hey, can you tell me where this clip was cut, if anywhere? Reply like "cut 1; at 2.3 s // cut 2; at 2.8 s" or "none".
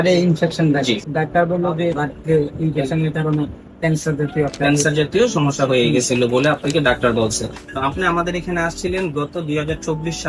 cut 1; at 1.0 s // cut 2; at 2.0 s // cut 3; at 7.6 s